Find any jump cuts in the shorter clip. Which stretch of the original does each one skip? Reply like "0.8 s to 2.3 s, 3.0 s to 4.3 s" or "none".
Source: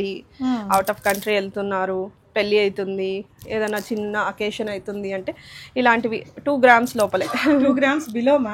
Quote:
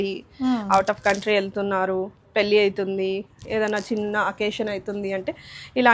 none